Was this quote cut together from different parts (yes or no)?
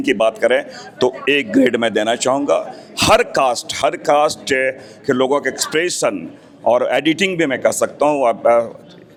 no